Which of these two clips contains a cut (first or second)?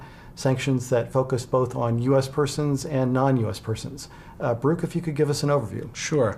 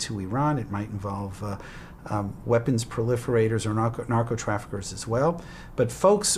second